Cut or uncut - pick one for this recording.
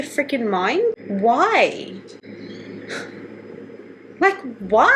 uncut